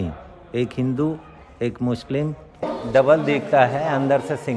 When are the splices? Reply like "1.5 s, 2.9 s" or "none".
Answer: 2.4 s